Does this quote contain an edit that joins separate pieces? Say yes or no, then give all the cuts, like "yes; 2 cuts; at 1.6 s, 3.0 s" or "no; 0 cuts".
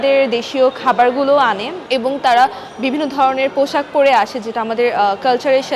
yes; 1 cut; at 1.7 s